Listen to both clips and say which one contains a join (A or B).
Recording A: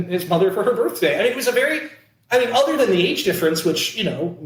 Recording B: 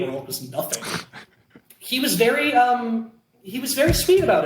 B